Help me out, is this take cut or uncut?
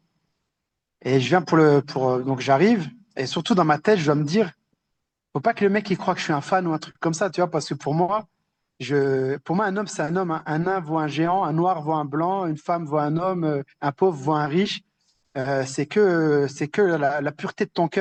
uncut